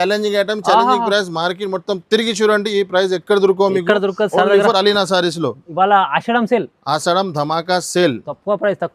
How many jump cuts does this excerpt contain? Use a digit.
0